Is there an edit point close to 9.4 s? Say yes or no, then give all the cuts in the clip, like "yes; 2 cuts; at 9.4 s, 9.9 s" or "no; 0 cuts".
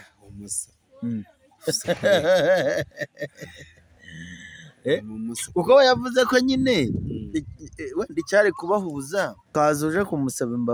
yes; 1 cut; at 9.4 s